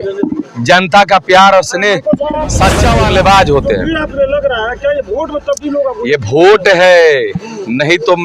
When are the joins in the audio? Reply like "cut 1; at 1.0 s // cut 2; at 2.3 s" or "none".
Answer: cut 1; at 2.9 s